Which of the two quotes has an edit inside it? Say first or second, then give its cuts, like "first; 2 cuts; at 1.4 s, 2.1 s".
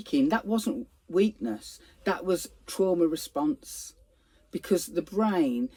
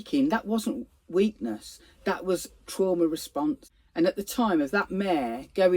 second; 1 cut; at 3.8 s